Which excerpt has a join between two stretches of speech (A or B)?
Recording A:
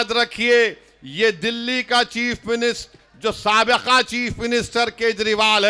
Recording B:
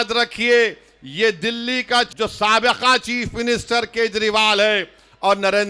B